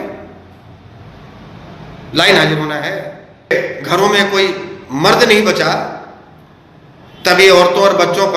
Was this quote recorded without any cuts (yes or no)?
no